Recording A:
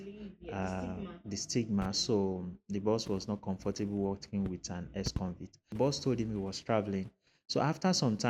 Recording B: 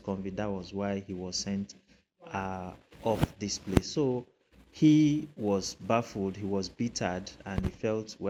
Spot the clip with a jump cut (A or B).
A